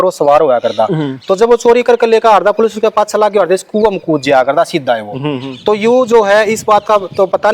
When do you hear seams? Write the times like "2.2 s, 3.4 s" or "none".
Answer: none